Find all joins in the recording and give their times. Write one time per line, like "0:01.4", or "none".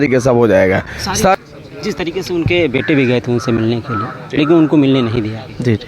0:01.4